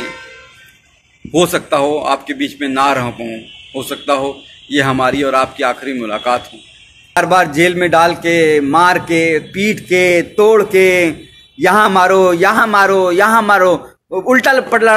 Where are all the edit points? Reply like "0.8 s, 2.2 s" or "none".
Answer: 7.2 s